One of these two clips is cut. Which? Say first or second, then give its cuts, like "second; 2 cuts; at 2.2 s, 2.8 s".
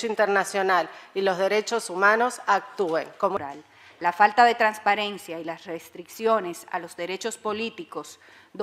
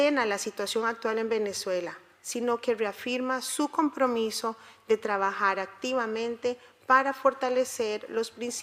first; 1 cut; at 3.4 s